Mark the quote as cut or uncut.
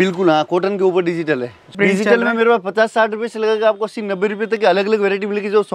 cut